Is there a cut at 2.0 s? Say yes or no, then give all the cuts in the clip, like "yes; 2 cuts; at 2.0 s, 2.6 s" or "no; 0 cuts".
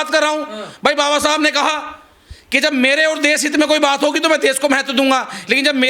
no; 0 cuts